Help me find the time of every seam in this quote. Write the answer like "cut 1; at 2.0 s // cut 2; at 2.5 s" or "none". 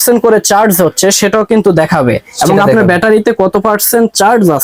none